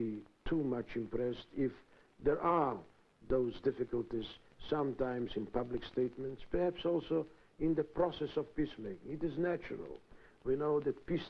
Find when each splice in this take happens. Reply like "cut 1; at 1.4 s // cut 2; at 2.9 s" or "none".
none